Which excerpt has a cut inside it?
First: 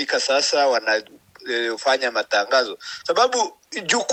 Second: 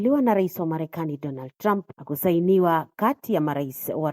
second; 1 cut; at 2.0 s

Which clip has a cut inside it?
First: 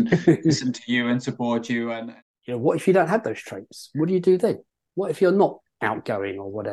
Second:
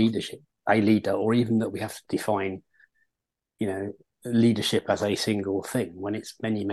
first; 1 cut; at 2.0 s

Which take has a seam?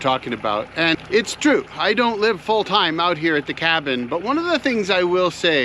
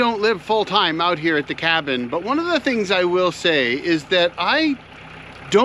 first; 1 cut; at 1.0 s

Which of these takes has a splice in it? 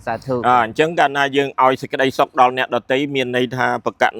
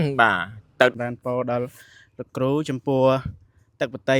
second; 1 cut; at 0.9 s

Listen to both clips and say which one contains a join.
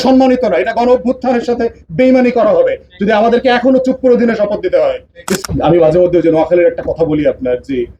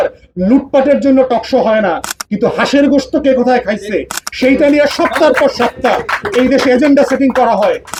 first; 1 cut; at 5.4 s

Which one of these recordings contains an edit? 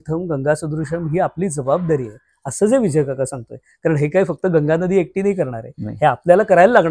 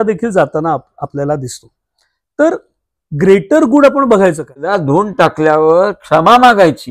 second; 1 cut; at 4.7 s

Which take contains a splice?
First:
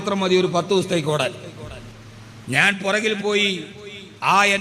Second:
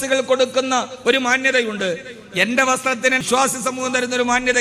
second; 1 cut; at 3.2 s

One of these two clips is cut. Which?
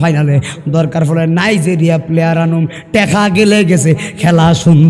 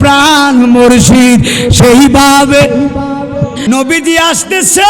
second; 1 cut; at 3.6 s

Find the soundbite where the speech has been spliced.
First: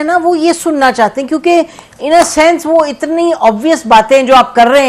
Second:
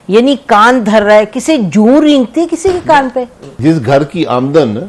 second; 1 cut; at 3.6 s

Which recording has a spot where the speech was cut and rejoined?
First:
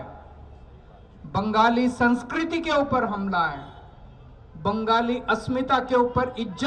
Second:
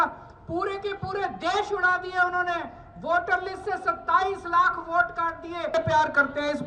second; 1 cut; at 5.7 s

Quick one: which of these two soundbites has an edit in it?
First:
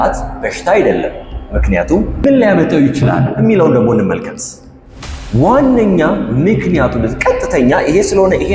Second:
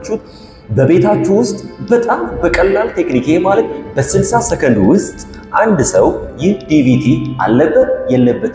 first; 1 cut; at 2.1 s

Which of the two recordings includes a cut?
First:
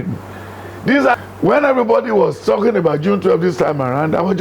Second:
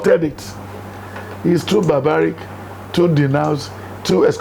first; 1 cut; at 1.1 s

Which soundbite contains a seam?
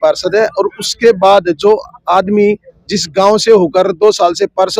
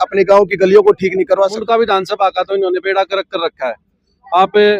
second; 1 cut; at 1.6 s

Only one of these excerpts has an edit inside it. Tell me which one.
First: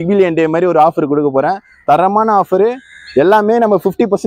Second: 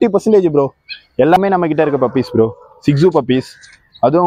second; 1 cut; at 1.4 s

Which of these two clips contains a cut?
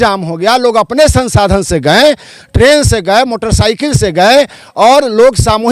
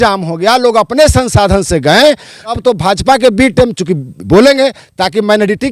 second; 1 cut; at 2.5 s

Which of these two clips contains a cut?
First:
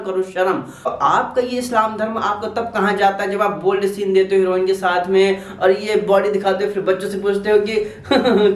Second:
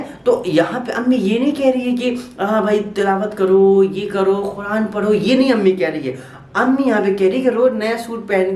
first; 1 cut; at 0.9 s

